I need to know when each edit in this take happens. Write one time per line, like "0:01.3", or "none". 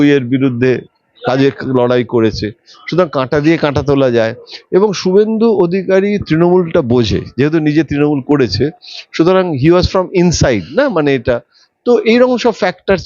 none